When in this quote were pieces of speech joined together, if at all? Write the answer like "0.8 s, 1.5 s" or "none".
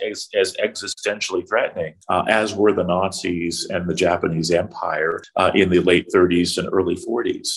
2.0 s, 5.2 s